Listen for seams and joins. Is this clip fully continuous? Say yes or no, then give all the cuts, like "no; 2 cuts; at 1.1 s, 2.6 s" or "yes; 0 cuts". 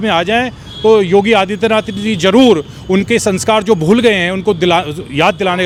yes; 0 cuts